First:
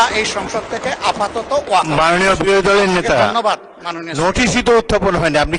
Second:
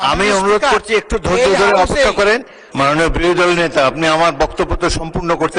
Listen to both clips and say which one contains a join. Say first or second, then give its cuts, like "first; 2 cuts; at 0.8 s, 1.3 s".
second; 1 cut; at 2.6 s